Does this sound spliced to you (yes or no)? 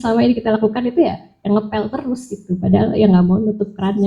no